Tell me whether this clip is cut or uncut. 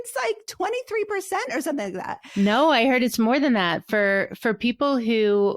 cut